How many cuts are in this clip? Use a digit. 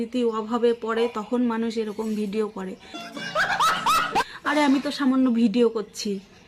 1